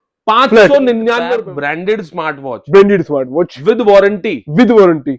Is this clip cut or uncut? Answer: cut